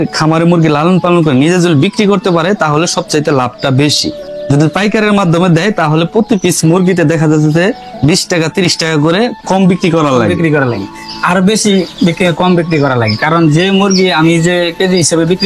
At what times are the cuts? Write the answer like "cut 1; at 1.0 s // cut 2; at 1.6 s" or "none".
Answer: none